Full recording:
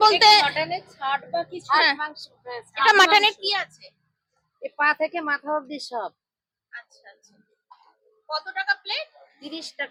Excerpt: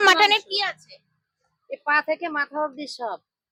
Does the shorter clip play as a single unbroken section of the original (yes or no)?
yes